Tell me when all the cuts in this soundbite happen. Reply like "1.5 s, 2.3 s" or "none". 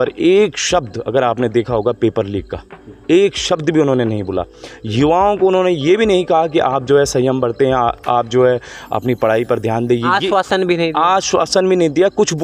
none

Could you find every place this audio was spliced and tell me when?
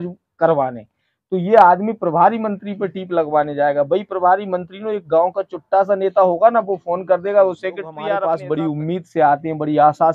8.1 s

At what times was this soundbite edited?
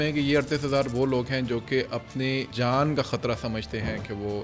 2.5 s

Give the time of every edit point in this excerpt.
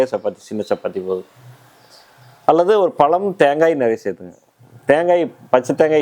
none

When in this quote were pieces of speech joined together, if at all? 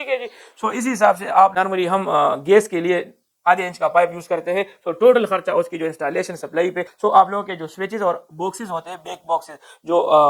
1.5 s, 6.9 s

